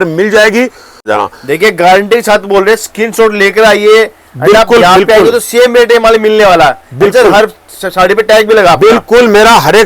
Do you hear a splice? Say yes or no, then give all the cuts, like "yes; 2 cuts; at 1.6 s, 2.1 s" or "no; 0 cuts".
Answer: yes; 1 cut; at 1.1 s